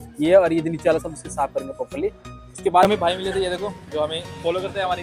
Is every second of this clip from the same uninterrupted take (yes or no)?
no